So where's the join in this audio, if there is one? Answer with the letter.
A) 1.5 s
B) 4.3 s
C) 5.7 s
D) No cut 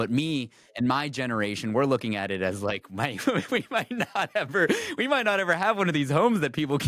D